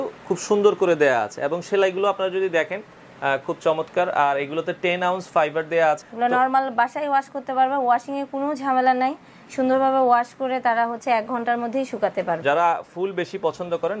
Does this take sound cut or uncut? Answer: cut